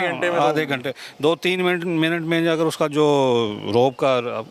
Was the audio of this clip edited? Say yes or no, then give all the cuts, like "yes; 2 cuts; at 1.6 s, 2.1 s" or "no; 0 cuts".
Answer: no; 0 cuts